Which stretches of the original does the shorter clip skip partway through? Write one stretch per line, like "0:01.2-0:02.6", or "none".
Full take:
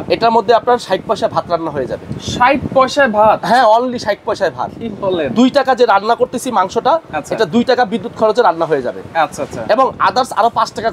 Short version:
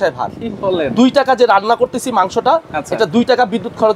none